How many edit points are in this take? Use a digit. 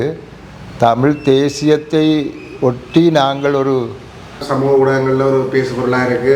1